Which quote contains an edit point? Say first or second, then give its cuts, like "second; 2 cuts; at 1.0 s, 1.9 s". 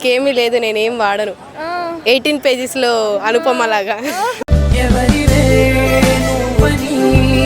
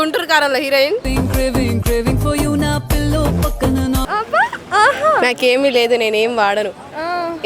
second; 2 cuts; at 1.0 s, 4.0 s